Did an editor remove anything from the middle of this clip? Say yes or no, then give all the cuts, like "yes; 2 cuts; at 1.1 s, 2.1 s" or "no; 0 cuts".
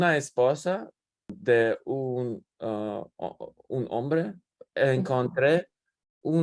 yes; 1 cut; at 1.3 s